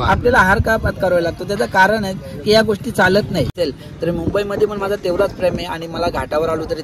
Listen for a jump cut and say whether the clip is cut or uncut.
cut